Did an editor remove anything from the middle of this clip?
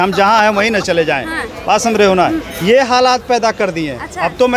no; 0 cuts

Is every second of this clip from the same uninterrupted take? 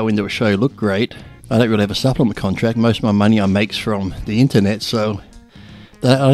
yes; 0 cuts

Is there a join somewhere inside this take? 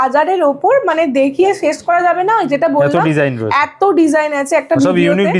no; 0 cuts

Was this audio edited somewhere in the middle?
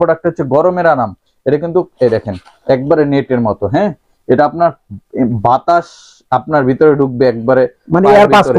no; 0 cuts

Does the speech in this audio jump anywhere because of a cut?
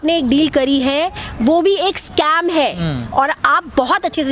no; 0 cuts

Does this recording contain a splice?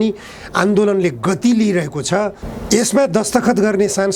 yes; 1 cut; at 2.5 s

